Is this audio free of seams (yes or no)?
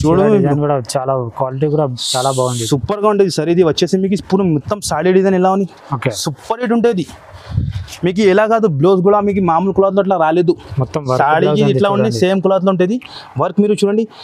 yes